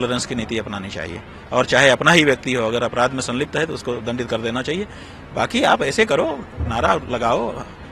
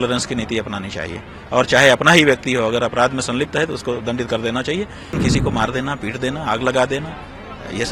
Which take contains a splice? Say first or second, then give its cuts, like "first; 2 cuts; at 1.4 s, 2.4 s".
second; 1 cut; at 5.2 s